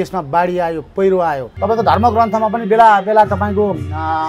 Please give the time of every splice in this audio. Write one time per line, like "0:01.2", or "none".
0:01.5